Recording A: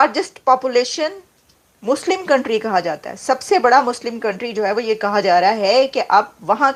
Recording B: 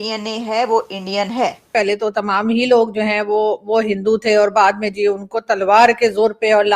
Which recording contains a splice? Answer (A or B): B